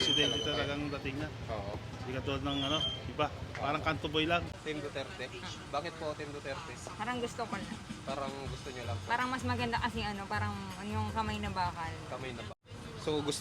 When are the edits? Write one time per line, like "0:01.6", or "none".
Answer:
0:04.5
0:12.5